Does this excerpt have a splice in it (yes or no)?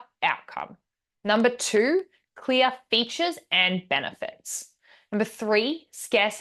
no